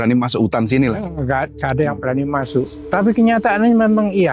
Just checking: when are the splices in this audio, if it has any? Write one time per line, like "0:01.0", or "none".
0:02.8